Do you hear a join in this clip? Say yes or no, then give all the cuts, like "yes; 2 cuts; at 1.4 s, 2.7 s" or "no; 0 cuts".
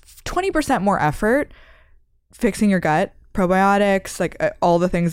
no; 0 cuts